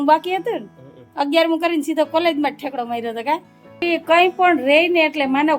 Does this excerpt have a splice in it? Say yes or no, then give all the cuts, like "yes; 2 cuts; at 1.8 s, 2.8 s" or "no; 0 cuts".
yes; 1 cut; at 3.8 s